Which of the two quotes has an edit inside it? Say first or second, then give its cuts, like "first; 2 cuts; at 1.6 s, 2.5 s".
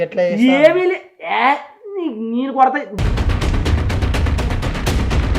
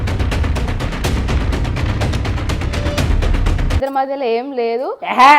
second; 1 cut; at 3.8 s